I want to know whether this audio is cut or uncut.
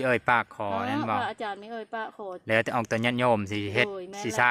uncut